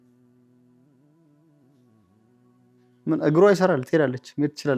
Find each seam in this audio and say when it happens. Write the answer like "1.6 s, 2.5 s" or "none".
none